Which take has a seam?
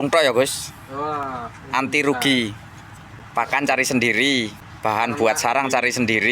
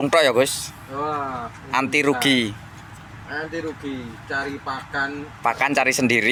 first; 2 cuts; at 3.1 s, 4.6 s

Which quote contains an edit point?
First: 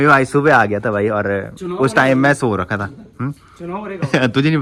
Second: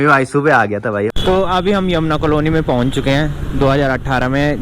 second; 1 cut; at 1.1 s

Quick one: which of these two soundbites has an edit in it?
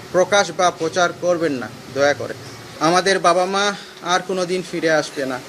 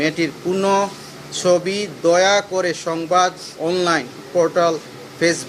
first; 1 cut; at 2.6 s

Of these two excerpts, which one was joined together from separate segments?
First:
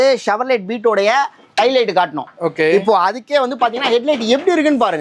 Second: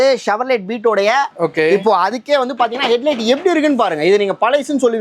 second; 1 cut; at 1.3 s

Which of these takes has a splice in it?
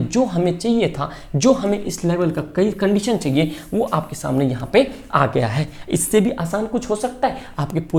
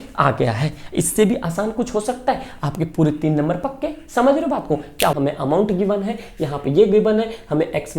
second; 1 cut; at 5.1 s

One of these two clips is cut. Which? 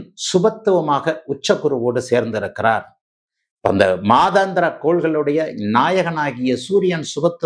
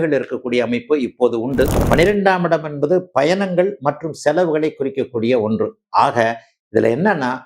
second; 1 cut; at 1.8 s

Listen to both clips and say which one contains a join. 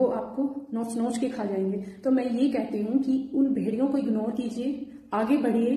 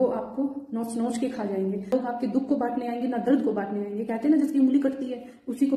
second; 1 cut; at 1.9 s

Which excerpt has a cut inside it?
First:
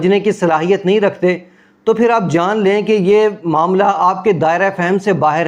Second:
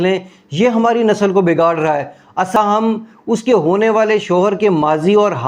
second; 1 cut; at 2.6 s

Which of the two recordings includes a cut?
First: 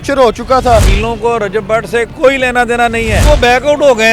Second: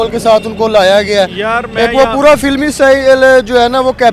first; 2 cuts; at 0.9 s, 3.3 s

